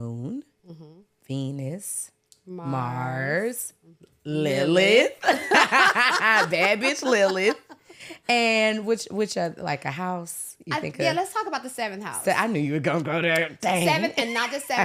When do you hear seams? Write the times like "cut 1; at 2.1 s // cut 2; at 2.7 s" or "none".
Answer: none